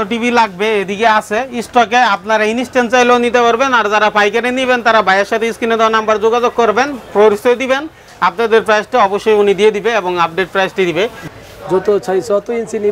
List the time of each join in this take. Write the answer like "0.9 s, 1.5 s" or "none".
11.2 s